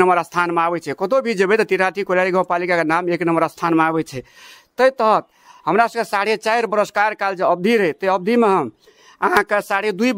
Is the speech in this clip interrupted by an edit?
no; 0 cuts

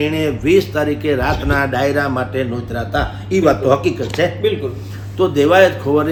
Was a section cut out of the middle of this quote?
no; 0 cuts

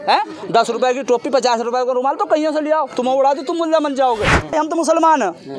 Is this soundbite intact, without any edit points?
no; 1 cut; at 4.5 s

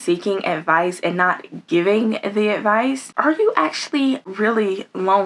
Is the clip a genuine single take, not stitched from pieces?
no; 2 cuts; at 3.1 s, 4.3 s

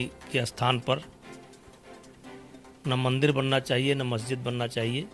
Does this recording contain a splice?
yes; 2 cuts; at 1.1 s, 2.8 s

